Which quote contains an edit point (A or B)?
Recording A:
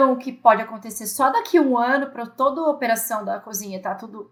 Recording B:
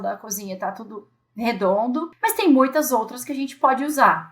B